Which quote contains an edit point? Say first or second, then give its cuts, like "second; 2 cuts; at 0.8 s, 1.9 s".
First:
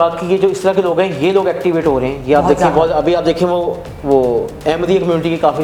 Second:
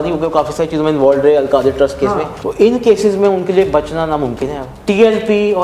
second; 2 cuts; at 2.4 s, 4.7 s